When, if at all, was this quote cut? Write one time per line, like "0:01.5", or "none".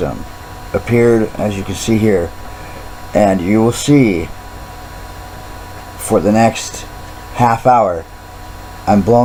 none